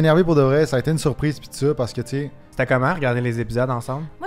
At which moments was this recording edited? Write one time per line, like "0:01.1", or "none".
0:02.4